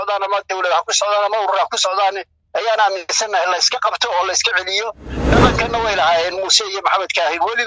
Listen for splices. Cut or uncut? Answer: cut